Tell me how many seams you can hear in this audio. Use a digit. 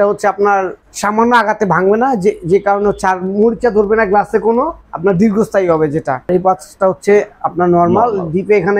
1